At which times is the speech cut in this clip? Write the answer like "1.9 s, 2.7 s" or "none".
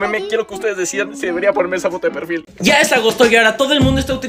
2.5 s